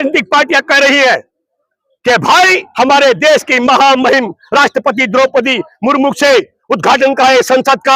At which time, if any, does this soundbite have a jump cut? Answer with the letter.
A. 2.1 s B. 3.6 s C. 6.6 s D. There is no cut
D